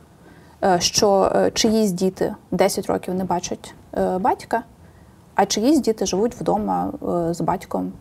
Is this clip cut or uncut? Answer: uncut